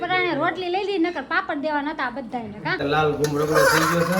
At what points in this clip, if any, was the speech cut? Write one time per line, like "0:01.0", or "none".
0:02.8